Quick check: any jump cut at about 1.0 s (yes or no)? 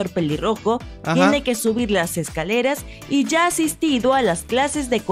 yes